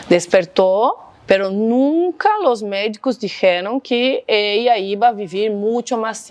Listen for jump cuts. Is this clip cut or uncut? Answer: uncut